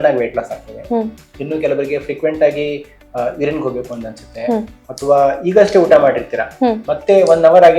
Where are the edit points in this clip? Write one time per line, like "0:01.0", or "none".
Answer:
none